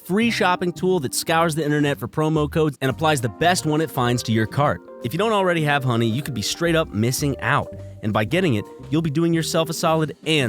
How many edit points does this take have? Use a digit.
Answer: 1